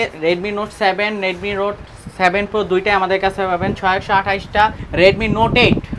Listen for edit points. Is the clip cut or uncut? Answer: cut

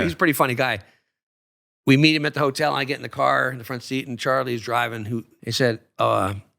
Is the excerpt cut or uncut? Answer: cut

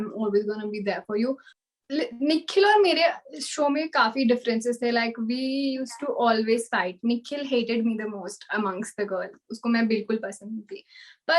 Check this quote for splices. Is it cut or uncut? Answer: cut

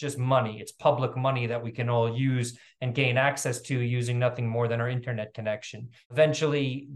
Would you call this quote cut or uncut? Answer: cut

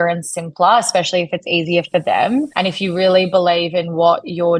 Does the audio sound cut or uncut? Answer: cut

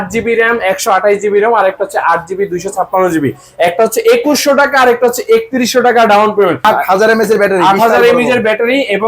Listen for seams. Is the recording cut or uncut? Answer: cut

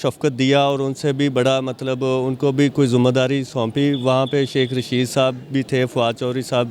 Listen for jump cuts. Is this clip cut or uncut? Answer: uncut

